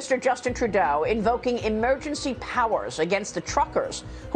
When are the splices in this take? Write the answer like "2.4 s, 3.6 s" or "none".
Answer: none

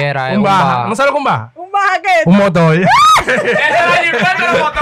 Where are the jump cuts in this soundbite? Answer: none

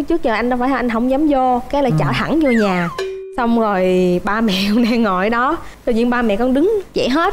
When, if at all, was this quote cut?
none

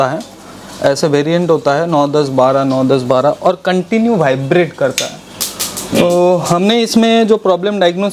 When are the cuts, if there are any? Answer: none

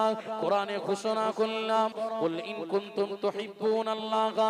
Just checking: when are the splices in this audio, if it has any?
2.0 s

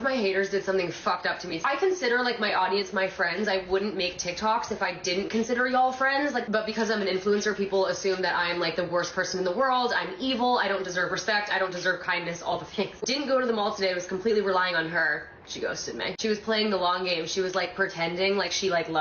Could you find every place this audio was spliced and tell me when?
1.6 s, 6.5 s, 13.0 s

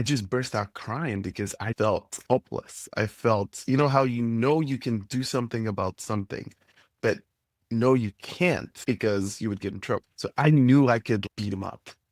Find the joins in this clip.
2.1 s, 8.7 s, 10.2 s

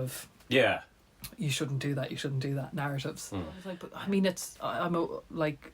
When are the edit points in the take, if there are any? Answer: 3.9 s

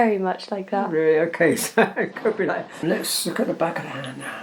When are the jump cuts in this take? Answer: 2.8 s

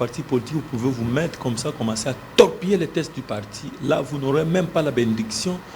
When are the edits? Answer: none

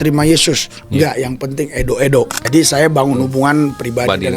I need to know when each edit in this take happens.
2.4 s

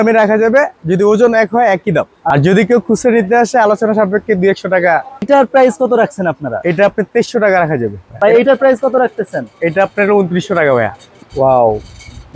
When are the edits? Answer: 2.2 s, 5.2 s, 8.1 s, 11.1 s

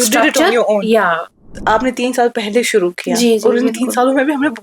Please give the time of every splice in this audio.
1.6 s

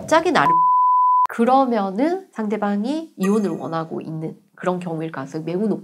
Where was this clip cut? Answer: 3.1 s

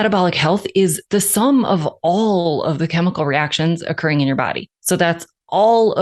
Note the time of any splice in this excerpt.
1.0 s, 4.7 s

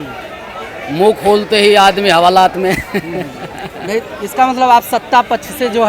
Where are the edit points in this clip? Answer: none

